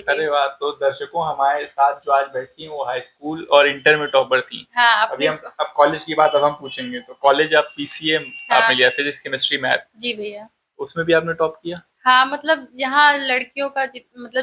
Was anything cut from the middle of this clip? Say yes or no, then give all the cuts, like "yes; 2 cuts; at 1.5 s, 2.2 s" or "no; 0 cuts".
no; 0 cuts